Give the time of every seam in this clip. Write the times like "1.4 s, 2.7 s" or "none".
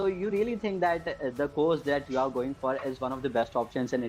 none